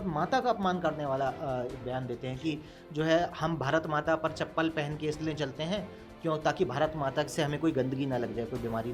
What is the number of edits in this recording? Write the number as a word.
zero